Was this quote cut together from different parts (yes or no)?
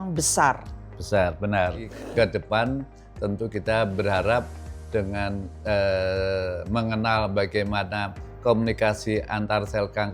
yes